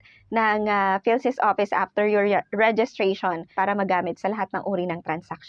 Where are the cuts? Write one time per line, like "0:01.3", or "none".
0:03.5